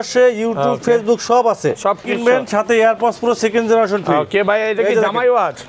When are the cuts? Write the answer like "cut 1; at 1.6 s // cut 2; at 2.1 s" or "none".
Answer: cut 1; at 2.0 s